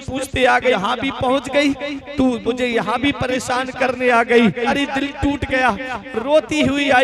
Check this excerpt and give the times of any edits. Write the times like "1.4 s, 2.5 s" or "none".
0.7 s, 4.7 s

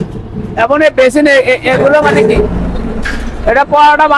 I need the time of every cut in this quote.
2.8 s

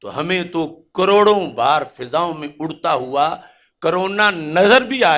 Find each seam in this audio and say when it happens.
none

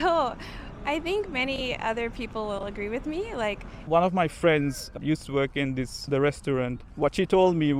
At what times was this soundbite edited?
3.8 s, 5.0 s, 6.0 s

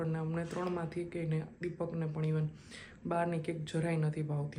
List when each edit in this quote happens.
none

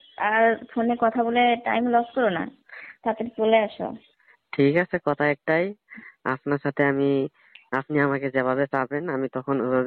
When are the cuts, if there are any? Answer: none

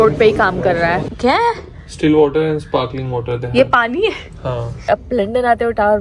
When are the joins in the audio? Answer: 1.1 s, 4.9 s

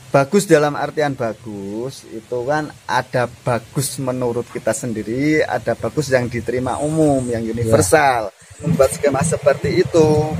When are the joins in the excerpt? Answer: 8.6 s

